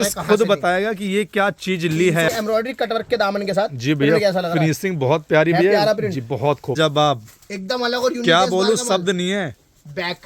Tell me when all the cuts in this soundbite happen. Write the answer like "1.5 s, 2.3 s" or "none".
2.3 s, 6.7 s